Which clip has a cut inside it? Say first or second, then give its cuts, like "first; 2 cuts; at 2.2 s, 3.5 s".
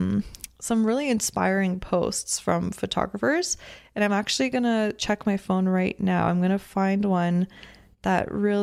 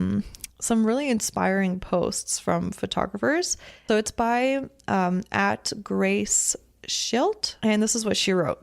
second; 2 cuts; at 3.8 s, 7.5 s